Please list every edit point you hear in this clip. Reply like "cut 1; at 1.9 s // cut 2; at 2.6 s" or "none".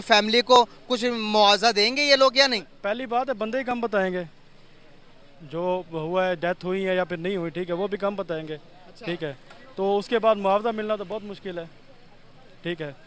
none